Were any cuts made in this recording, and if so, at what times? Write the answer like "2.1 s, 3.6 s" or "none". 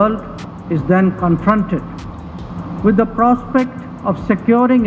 none